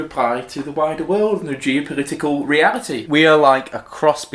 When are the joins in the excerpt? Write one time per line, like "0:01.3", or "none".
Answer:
0:03.0